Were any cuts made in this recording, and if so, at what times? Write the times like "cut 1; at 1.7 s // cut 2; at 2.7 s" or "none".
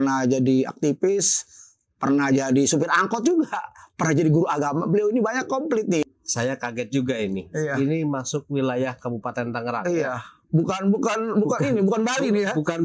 cut 1; at 6.0 s